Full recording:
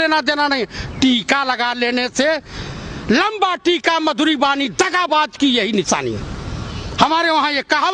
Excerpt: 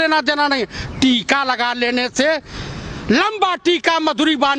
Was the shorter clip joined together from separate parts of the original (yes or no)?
no